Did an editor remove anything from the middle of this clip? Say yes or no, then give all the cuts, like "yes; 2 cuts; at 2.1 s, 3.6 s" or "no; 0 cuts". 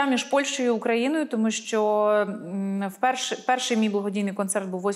no; 0 cuts